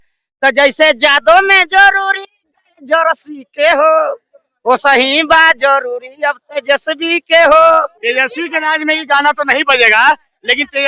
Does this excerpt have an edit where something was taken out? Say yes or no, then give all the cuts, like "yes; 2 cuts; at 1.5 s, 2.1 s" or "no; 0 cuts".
yes; 1 cut; at 7.9 s